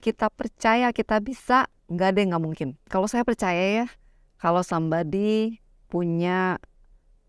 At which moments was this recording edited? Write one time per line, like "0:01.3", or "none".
0:02.8

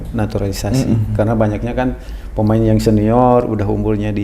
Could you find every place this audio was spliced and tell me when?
none

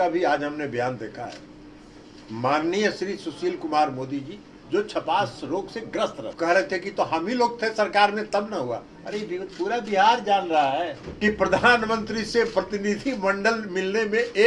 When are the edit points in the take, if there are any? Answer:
0:06.2
0:11.0

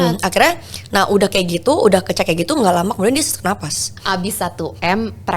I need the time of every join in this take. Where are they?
0:03.9

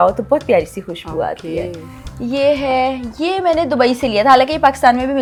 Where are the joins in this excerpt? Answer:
none

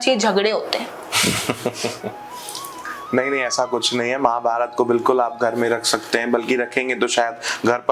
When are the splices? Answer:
none

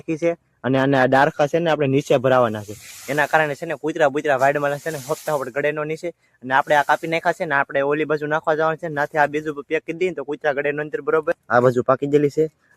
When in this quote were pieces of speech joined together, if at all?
0:11.4

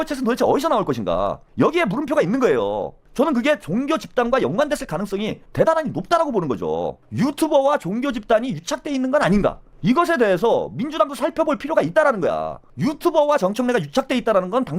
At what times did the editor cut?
0:03.0
0:07.0
0:09.7
0:12.6

